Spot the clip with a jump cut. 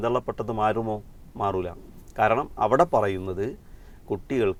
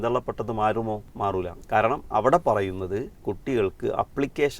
second; 2 cuts; at 1.3 s, 3.1 s

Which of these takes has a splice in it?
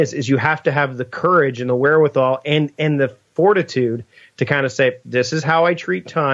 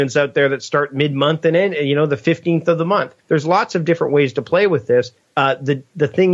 second; 2 cuts; at 3.1 s, 5.2 s

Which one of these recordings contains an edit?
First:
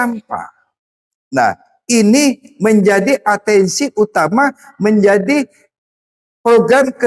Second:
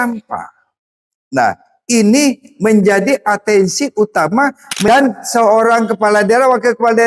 second; 1 cut; at 4.9 s

